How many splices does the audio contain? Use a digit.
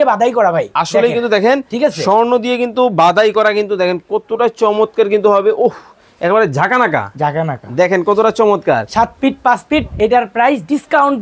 0